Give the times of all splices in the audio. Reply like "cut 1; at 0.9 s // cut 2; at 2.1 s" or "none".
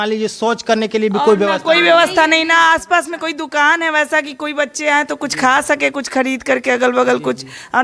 none